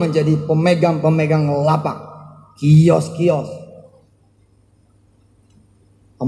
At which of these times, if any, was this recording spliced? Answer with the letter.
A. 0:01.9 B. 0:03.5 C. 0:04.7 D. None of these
D